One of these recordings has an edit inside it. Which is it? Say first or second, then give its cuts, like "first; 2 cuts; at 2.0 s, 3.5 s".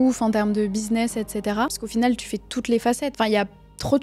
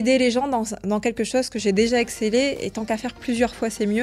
first; 2 cuts; at 1.8 s, 3.1 s